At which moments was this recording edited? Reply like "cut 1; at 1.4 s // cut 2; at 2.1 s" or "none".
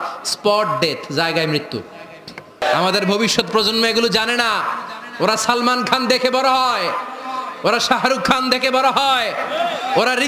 cut 1; at 2.6 s